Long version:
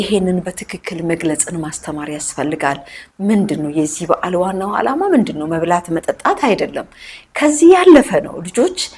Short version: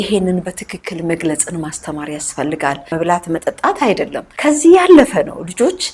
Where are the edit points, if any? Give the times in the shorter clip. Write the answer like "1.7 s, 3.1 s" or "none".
2.9 s, 4.2 s